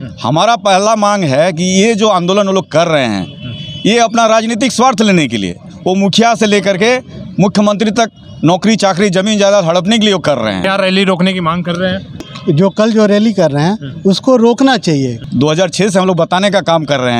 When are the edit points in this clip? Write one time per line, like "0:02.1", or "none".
0:10.6
0:12.3
0:15.1